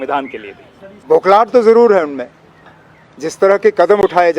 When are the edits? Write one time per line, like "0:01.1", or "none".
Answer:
0:01.0